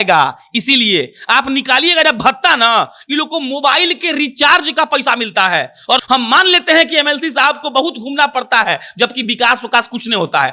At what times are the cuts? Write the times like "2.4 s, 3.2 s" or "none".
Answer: 6.0 s